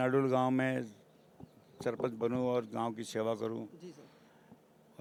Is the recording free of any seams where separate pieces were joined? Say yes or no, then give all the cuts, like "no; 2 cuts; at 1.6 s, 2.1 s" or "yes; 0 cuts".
yes; 0 cuts